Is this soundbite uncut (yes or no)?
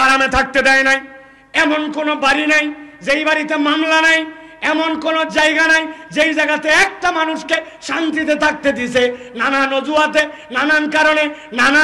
yes